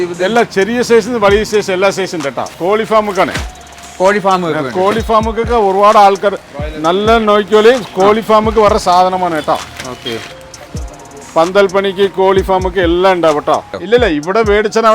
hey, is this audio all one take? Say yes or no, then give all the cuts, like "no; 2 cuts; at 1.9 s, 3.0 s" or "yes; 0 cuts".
no; 2 cuts; at 2.5 s, 13.8 s